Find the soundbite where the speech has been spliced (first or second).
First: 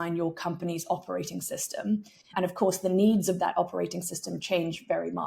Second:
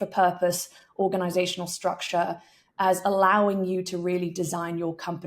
first